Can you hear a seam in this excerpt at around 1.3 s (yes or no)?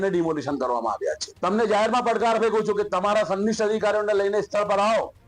yes